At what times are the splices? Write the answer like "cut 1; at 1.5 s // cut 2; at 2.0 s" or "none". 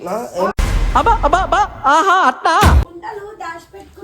cut 1; at 2.9 s